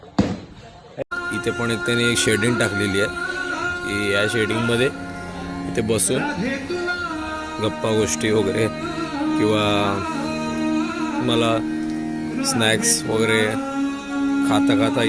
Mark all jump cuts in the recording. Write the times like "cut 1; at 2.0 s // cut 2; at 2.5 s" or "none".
cut 1; at 1.0 s